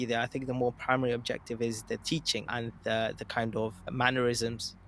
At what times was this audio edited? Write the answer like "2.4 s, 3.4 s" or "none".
2.7 s, 3.9 s